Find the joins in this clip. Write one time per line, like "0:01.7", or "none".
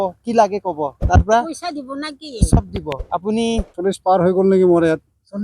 0:03.7